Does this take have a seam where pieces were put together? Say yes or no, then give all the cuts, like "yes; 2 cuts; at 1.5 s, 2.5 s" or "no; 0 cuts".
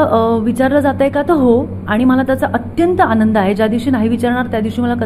no; 0 cuts